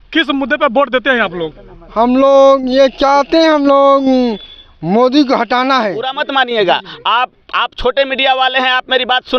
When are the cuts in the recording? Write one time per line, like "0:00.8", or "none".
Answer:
0:06.1